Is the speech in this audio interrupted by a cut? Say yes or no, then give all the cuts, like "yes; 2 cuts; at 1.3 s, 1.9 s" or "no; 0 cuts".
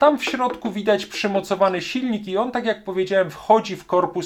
no; 0 cuts